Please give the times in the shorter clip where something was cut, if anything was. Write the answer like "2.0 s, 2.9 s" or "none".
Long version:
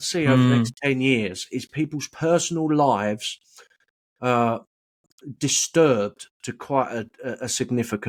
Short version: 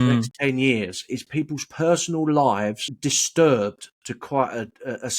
2.9 s